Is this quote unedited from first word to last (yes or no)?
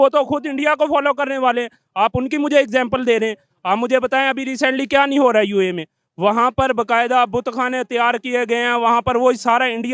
yes